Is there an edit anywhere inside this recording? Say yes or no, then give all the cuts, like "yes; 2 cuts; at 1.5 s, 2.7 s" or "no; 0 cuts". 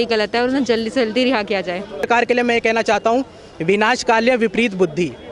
yes; 1 cut; at 2.1 s